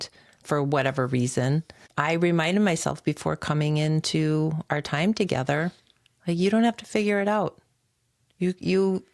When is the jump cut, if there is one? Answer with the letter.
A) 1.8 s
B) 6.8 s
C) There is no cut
A